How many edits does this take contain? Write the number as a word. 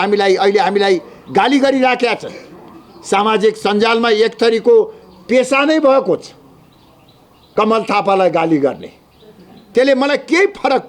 zero